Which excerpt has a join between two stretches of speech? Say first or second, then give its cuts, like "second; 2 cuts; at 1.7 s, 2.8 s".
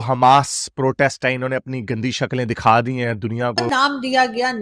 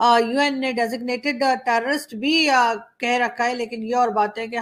first; 1 cut; at 3.7 s